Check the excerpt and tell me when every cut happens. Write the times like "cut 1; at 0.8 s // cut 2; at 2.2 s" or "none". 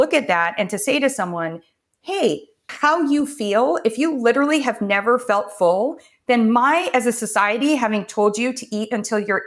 cut 1; at 2.6 s